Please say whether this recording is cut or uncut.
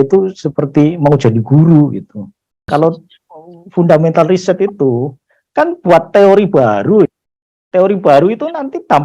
cut